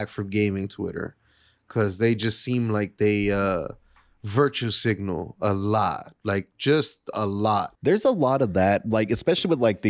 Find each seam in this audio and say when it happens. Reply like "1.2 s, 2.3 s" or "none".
7.7 s